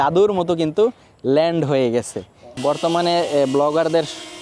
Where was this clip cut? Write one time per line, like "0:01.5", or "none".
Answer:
0:02.5

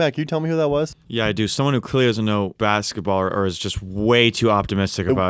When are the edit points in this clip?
0:02.5

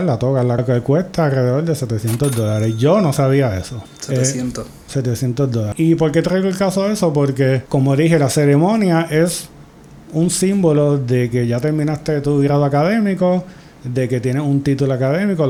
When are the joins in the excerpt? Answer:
none

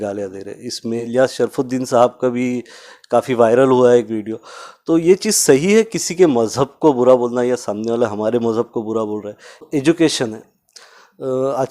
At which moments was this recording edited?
0:01.0
0:09.6

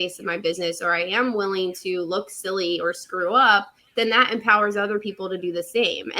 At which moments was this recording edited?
0:03.8

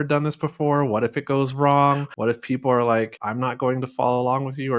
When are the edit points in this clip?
0:02.1
0:03.2

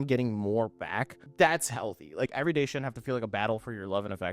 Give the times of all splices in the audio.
0:01.2
0:02.3

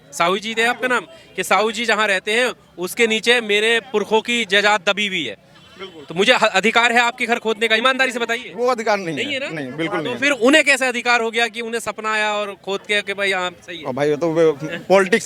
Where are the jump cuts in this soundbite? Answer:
none

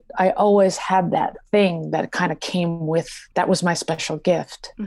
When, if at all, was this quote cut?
0:03.2

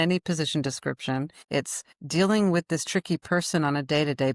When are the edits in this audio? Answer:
0:01.6

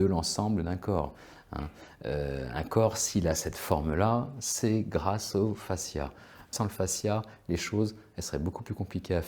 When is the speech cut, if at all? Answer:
0:06.5

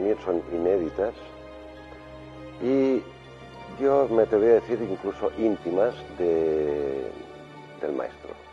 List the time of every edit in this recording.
0:06.1

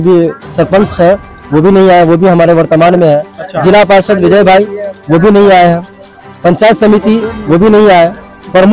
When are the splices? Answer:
none

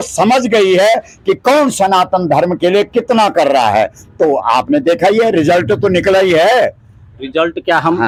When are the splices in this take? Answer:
none

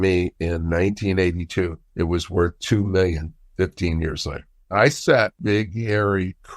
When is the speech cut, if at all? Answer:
0:01.8
0:04.7

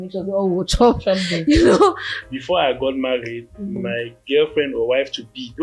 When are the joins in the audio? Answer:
0:02.1

